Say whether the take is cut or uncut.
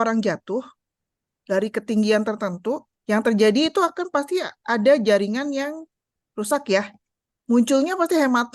cut